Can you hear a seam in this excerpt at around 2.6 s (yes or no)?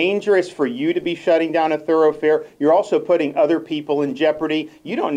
no